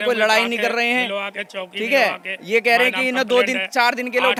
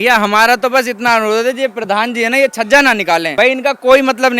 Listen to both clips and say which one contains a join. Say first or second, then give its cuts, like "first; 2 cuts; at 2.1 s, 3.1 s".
second; 1 cut; at 3.3 s